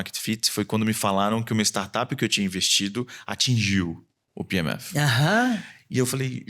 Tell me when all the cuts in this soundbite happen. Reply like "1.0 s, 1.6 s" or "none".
none